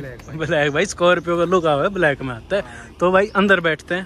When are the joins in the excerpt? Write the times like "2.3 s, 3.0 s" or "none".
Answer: none